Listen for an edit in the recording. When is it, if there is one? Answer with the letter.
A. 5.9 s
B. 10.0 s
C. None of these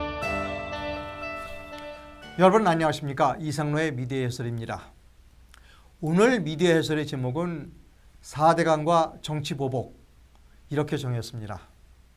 C